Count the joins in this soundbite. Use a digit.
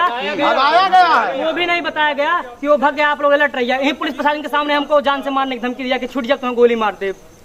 0